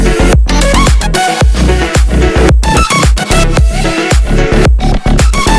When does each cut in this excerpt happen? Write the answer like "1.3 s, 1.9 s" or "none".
none